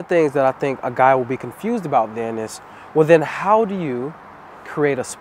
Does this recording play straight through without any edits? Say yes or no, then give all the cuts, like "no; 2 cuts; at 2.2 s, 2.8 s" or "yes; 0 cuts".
yes; 0 cuts